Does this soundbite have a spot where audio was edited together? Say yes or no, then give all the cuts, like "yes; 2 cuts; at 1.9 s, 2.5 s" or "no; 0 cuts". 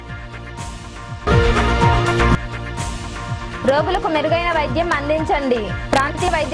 yes; 1 cut; at 1.2 s